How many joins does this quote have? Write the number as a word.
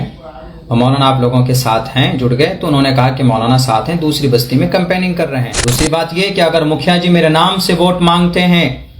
one